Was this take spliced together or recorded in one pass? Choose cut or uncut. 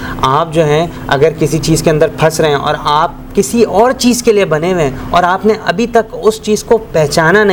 uncut